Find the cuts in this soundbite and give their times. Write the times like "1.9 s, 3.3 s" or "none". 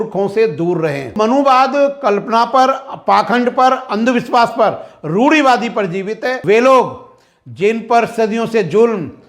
1.1 s, 6.3 s

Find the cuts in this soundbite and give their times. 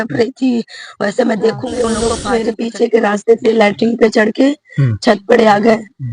2.0 s

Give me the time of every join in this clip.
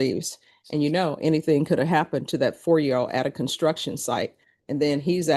none

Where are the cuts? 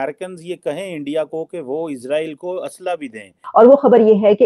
3.4 s

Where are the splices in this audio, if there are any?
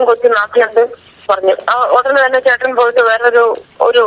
1.2 s

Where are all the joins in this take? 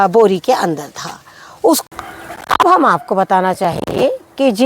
1.8 s

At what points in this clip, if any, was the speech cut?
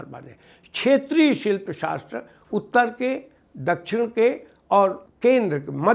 5.1 s

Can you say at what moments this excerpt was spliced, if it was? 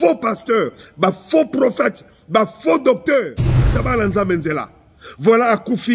3.8 s

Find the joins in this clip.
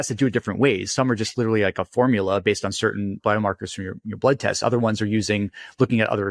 3.2 s

